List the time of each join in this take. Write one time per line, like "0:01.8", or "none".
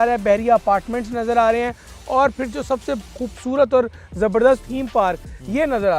0:04.7